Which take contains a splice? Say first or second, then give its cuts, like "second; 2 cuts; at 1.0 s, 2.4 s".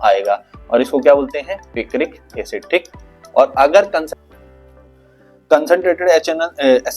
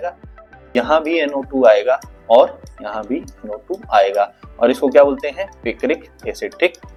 first; 1 cut; at 4.1 s